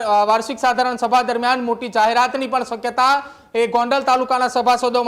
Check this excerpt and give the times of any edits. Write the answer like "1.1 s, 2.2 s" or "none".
none

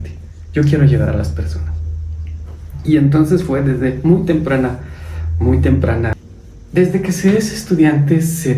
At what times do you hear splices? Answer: 6.2 s

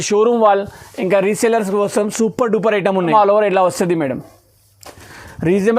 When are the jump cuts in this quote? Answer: 3.0 s

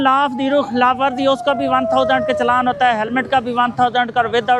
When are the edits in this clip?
none

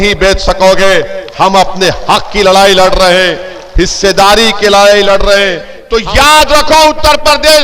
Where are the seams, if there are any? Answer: 5.7 s

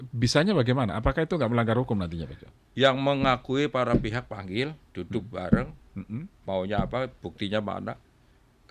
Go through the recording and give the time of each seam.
none

